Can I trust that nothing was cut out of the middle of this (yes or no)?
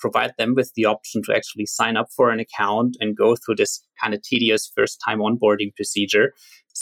yes